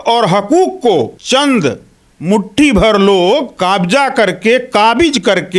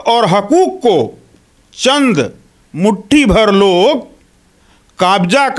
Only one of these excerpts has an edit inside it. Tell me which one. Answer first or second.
first